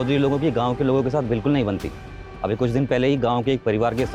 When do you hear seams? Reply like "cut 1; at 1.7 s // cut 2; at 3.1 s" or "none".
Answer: none